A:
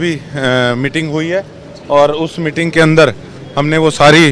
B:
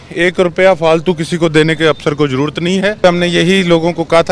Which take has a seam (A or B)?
B